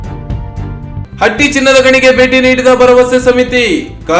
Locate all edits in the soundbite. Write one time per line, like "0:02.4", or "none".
0:01.1